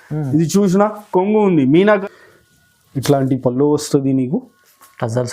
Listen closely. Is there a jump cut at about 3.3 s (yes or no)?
no